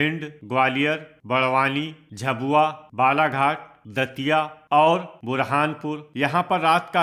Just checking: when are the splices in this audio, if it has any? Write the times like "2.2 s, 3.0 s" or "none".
1.1 s, 2.4 s, 3.8 s, 5.1 s, 6.1 s